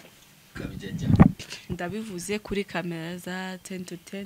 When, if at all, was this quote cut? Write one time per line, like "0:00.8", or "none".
0:01.5

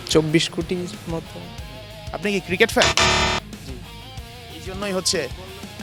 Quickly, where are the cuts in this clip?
none

